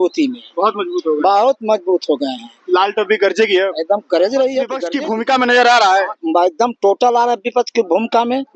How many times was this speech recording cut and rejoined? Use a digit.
1